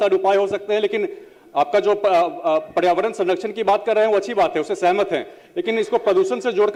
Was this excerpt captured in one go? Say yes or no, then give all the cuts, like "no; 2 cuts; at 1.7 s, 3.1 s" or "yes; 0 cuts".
yes; 0 cuts